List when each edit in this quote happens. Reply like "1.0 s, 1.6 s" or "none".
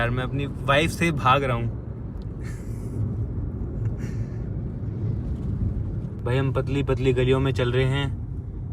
none